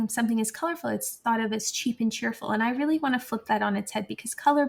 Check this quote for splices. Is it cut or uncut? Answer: uncut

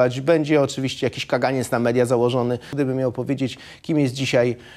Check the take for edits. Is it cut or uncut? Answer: cut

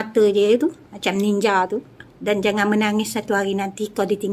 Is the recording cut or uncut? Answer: cut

